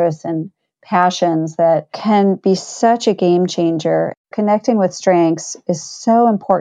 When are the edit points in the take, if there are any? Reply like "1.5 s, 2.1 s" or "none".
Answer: 1.9 s, 4.1 s